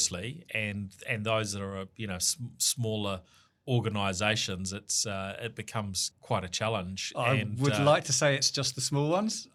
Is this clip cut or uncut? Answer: uncut